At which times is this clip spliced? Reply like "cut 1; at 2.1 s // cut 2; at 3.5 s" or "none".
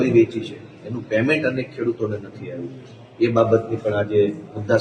none